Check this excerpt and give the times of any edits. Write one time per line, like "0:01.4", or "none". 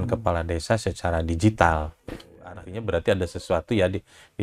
0:02.5